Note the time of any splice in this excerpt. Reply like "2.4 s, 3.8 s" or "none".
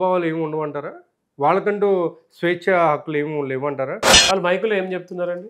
4.1 s